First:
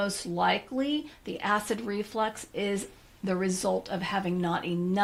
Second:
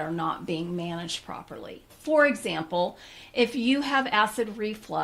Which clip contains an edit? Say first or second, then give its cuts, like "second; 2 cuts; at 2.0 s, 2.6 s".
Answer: second; 1 cut; at 1.9 s